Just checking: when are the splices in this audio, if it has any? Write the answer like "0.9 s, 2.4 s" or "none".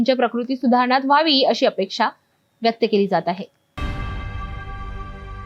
4.5 s